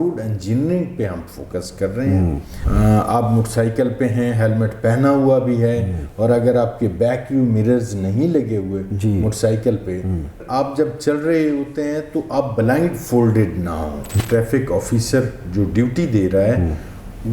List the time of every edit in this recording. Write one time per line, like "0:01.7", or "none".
0:02.5
0:10.4
0:14.2